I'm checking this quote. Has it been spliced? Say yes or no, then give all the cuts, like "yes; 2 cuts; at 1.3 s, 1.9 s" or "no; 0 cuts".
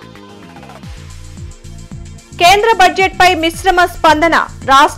yes; 1 cut; at 2.0 s